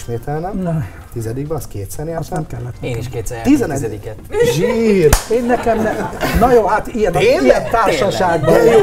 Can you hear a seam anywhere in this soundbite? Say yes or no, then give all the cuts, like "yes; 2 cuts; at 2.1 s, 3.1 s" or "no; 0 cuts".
no; 0 cuts